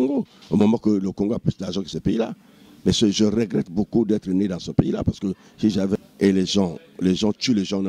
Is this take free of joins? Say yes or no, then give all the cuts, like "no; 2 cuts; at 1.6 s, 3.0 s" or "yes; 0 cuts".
no; 1 cut; at 6.0 s